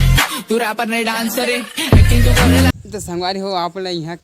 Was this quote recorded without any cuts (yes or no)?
no